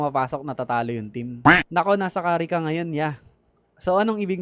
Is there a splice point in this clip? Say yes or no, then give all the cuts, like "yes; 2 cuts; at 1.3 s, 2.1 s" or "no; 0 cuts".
no; 0 cuts